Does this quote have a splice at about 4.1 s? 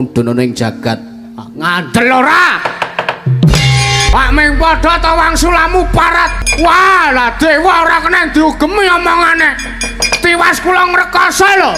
yes; 2 cuts; at 4.1 s, 6.4 s

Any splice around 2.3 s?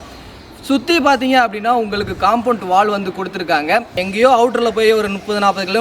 no; 1 cut; at 3.9 s

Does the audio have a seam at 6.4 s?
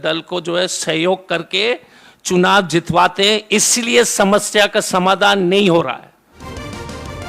yes; 1 cut; at 6.4 s

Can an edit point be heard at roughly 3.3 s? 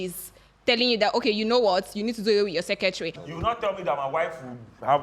yes; 1 cut; at 3.3 s

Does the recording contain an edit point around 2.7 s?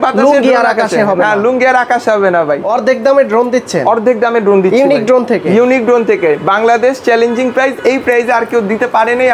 yes; 1 cut; at 2.7 s

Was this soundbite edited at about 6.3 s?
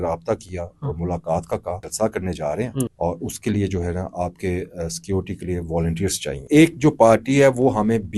yes; 3 cuts; at 1.9 s, 2.9 s, 6.3 s

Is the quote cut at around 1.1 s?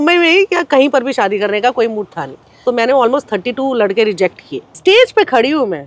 no; 2 cuts; at 2.6 s, 4.7 s

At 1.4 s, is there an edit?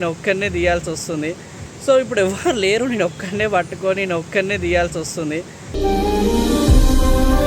no; 0 cuts

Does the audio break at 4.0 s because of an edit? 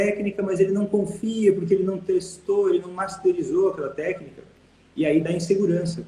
no; 0 cuts

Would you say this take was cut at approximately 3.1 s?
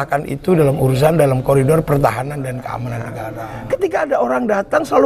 yes; 1 cut; at 3.1 s

